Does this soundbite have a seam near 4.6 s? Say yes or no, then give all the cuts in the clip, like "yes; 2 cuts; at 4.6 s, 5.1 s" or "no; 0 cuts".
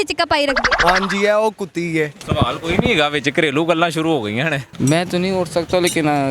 yes; 2 cuts; at 2.2 s, 4.6 s